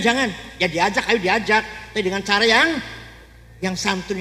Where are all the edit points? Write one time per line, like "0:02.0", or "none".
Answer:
none